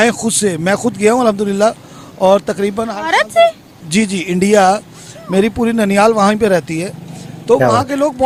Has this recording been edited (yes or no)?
no